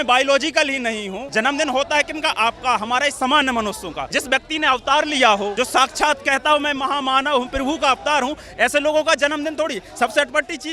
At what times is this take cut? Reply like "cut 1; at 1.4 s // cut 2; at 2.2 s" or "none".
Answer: cut 1; at 1.2 s // cut 2; at 4.0 s // cut 3; at 5.5 s

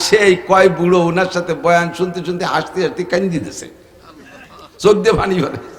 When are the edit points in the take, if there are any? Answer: none

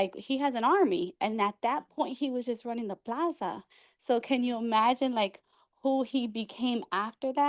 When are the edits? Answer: none

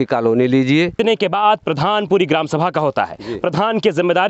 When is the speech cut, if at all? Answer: cut 1; at 1.0 s

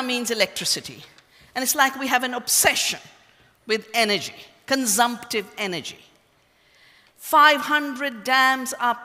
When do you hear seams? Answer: cut 1; at 3.9 s

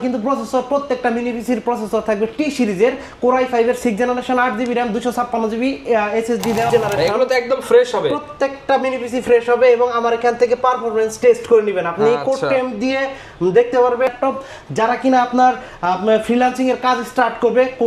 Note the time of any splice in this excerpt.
cut 1; at 6.7 s // cut 2; at 14.1 s

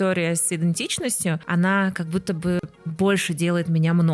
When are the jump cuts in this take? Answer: cut 1; at 1.4 s // cut 2; at 2.8 s

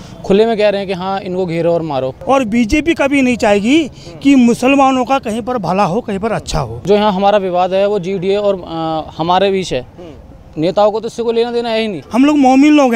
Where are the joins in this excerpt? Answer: cut 1; at 2.2 s // cut 2; at 6.7 s // cut 3; at 12.0 s

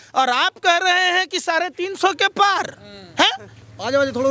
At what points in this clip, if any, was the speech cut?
none

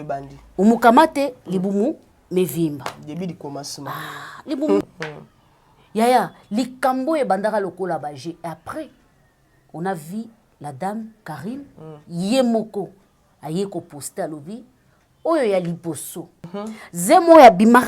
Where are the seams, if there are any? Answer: cut 1; at 4.8 s // cut 2; at 16.4 s

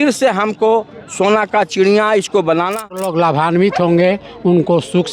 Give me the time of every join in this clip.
cut 1; at 3.0 s

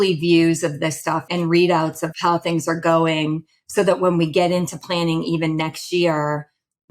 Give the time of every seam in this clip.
cut 1; at 1.2 s // cut 2; at 2.2 s

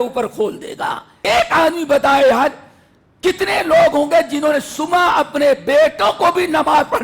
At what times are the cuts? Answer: cut 1; at 1.1 s

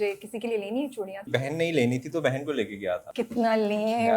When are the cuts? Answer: cut 1; at 1.2 s // cut 2; at 3.1 s

